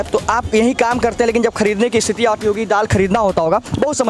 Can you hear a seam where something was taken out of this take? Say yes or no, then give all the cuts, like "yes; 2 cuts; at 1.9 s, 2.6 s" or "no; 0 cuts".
no; 0 cuts